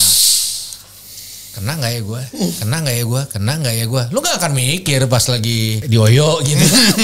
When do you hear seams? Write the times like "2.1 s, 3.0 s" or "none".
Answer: 5.8 s